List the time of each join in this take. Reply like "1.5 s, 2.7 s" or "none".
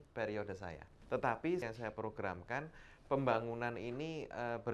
0.9 s, 1.6 s